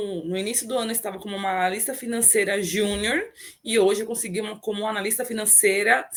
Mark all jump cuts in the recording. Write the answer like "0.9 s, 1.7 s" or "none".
none